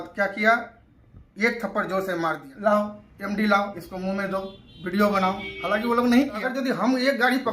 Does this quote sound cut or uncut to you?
cut